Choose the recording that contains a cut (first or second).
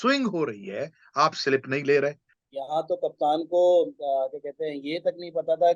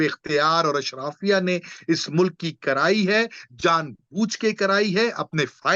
first